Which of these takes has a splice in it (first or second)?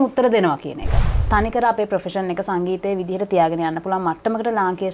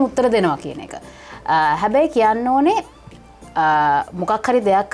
first